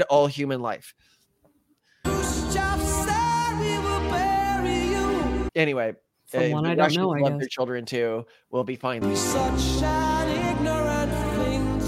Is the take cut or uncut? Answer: cut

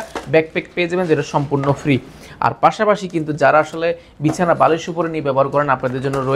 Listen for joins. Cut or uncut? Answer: uncut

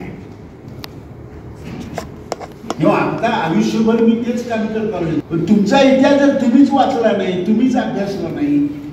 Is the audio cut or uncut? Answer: cut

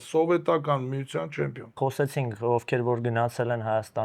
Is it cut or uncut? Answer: cut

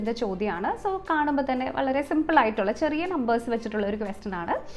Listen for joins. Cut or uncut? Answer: uncut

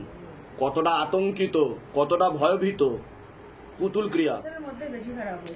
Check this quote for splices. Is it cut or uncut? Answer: cut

